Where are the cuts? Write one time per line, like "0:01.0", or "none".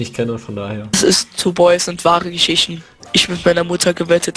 0:02.9

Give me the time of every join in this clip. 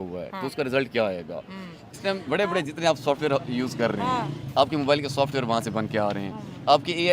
0:01.7

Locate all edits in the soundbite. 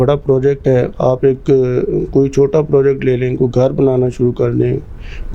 none

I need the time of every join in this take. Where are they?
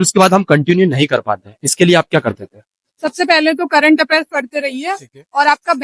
0:02.9

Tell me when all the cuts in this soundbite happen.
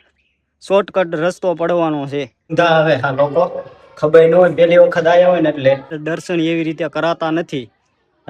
0:02.5
0:06.0

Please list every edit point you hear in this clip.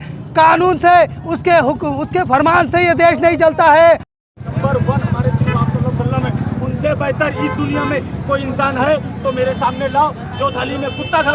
0:04.1

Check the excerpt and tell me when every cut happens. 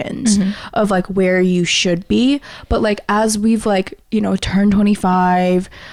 none

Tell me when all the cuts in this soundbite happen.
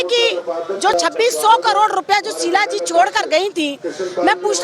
0:00.9

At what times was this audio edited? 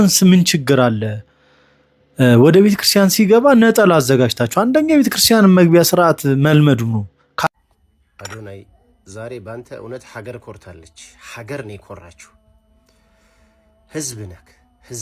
0:07.5

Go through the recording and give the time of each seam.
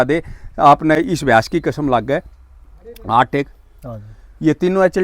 0:01.0

